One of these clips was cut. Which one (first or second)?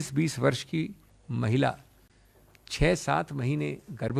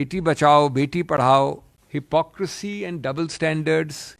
second